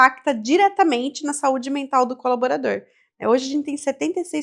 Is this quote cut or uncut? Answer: uncut